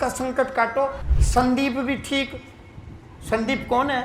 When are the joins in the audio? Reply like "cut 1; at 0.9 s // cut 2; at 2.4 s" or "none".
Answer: cut 1; at 1.1 s